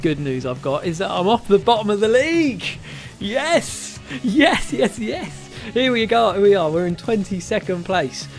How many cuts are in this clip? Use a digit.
0